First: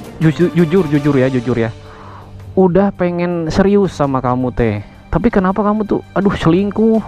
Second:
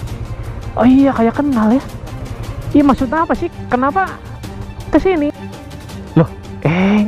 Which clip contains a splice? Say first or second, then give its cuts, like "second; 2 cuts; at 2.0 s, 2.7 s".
second; 1 cut; at 5.5 s